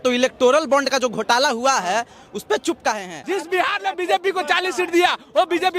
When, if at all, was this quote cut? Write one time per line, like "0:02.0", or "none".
0:03.1

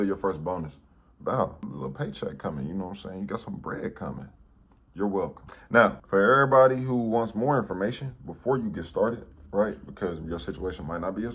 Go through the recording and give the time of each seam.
none

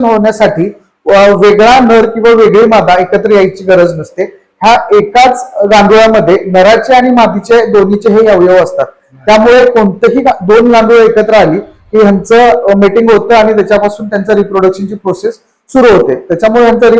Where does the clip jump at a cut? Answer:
none

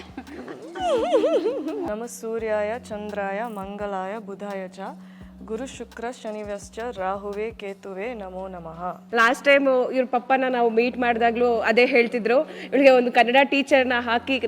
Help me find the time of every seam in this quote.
0:01.9
0:09.0

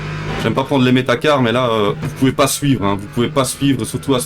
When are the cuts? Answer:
0:02.1

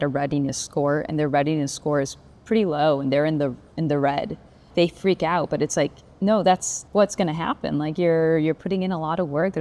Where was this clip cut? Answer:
0:04.7
0:06.7

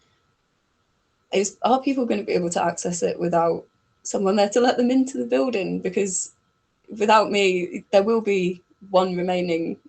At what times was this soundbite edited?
none

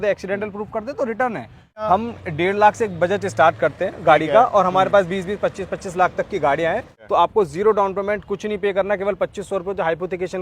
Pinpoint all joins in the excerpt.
0:01.8
0:07.0

